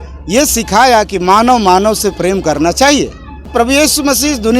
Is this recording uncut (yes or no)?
no